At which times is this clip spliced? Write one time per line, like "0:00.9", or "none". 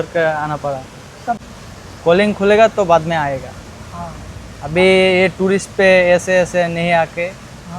0:01.5